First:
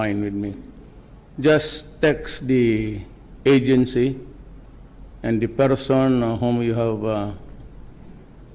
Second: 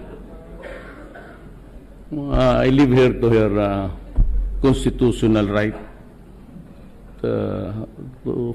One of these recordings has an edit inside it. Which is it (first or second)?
first